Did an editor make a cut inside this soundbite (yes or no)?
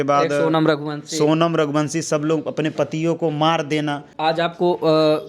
yes